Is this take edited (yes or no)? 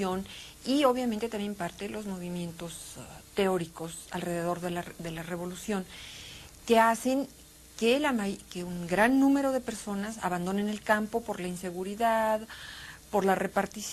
no